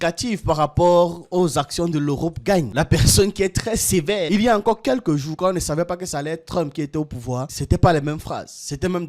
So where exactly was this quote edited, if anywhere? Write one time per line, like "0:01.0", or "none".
0:04.3